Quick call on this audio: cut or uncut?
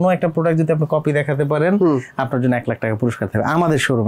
uncut